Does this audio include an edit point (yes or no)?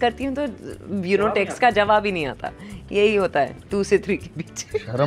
no